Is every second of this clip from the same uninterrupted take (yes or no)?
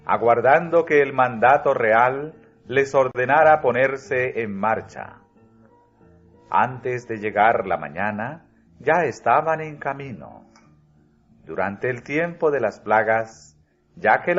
no